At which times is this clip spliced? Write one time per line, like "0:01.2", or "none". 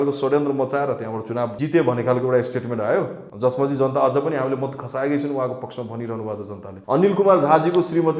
0:01.6
0:03.2
0:06.7